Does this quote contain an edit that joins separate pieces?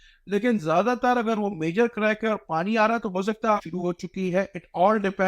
yes; 1 cut; at 3.6 s

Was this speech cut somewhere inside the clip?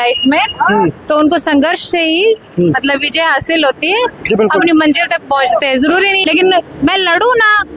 yes; 1 cut; at 6.2 s

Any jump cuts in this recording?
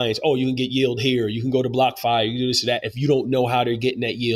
no; 0 cuts

